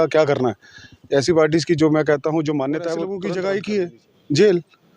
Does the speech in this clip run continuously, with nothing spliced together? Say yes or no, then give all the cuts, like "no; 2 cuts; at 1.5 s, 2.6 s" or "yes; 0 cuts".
no; 1 cut; at 3.2 s